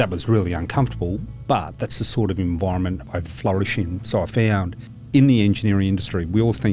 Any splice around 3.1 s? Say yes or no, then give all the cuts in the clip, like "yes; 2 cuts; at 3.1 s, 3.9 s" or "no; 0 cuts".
yes; 2 cuts; at 3.1 s, 5.0 s